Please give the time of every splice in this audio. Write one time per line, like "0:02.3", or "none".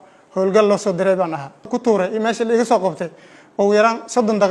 0:01.7